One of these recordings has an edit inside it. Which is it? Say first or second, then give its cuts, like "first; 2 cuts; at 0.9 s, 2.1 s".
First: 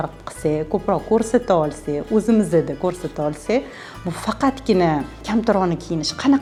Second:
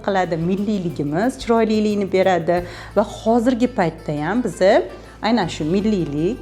second; 1 cut; at 2.8 s